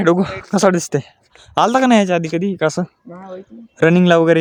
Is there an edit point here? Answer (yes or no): no